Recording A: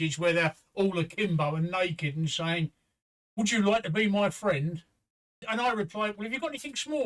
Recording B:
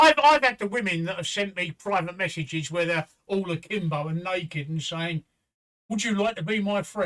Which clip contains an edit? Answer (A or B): A